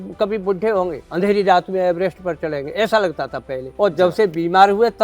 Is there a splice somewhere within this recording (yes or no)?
yes